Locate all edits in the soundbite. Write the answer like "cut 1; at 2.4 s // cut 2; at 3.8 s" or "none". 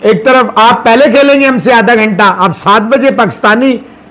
none